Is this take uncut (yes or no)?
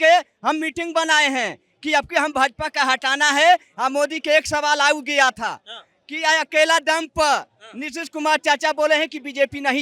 yes